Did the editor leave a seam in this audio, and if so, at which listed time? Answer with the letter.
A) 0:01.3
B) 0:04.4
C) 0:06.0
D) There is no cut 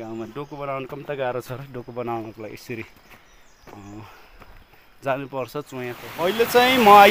C